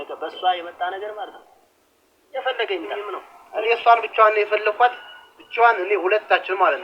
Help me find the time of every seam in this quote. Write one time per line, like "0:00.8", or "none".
0:02.9